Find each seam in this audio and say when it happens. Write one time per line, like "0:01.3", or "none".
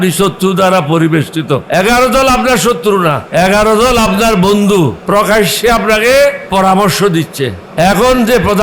0:01.6
0:03.2
0:05.0
0:06.5
0:07.6